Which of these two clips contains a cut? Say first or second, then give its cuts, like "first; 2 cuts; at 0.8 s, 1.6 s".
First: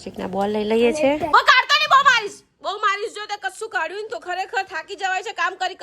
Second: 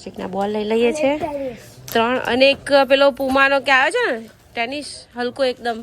first; 1 cut; at 1.3 s